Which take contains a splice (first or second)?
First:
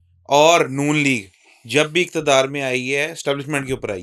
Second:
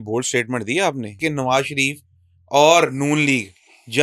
second